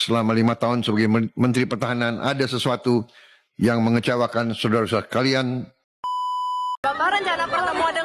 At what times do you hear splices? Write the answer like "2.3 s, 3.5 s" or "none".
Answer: 6.2 s